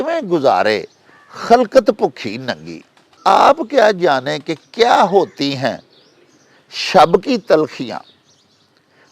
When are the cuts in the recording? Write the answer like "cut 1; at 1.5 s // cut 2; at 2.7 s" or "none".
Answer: cut 1; at 3.1 s